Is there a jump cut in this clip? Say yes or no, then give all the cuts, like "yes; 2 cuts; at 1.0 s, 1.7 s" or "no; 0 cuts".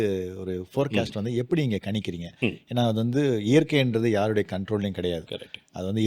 no; 0 cuts